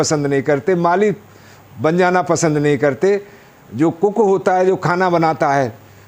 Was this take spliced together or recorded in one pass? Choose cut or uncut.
uncut